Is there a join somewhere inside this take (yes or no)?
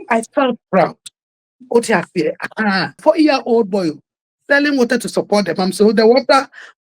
yes